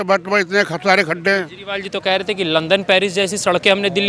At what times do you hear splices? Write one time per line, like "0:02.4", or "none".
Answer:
none